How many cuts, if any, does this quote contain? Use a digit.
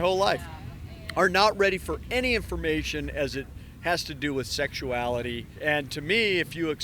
1